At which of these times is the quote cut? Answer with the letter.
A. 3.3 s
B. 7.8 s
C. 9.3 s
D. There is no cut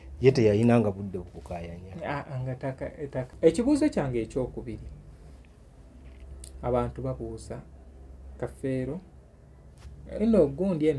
A